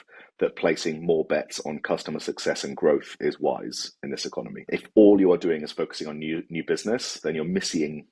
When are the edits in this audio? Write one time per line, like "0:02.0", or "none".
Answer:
0:04.7